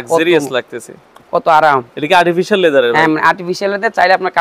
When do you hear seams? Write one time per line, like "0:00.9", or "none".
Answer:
none